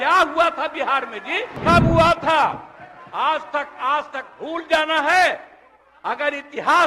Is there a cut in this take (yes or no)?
yes